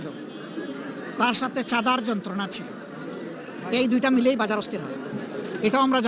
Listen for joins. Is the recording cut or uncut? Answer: uncut